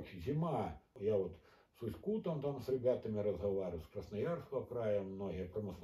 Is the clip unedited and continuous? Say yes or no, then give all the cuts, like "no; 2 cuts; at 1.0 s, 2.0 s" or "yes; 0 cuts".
no; 1 cut; at 1.0 s